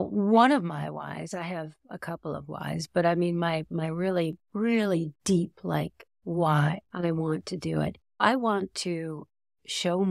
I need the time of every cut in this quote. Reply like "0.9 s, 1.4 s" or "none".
6.9 s, 8.2 s